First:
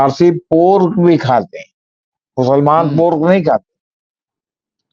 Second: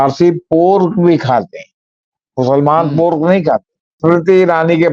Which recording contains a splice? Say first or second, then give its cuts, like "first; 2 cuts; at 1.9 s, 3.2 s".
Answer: second; 1 cut; at 4.0 s